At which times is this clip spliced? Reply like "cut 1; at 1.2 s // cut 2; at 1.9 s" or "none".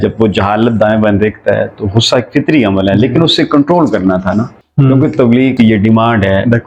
cut 1; at 4.6 s // cut 2; at 5.5 s